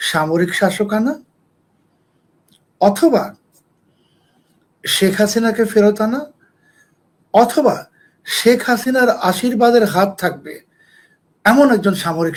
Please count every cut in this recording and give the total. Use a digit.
0